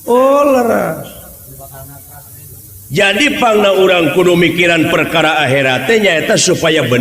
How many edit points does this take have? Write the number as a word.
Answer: zero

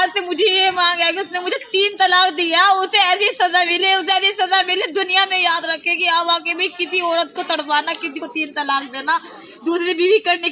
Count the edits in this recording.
zero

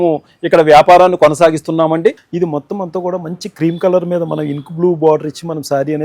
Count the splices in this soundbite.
one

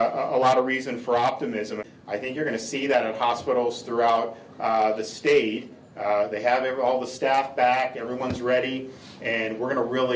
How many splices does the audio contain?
one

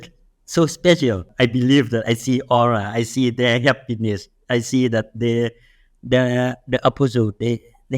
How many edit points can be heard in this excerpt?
one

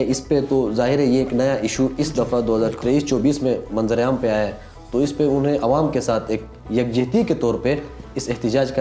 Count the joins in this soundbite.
zero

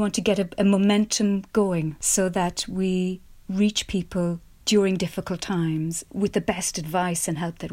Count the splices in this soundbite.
two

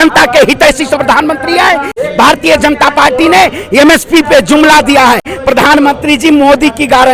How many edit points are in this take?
two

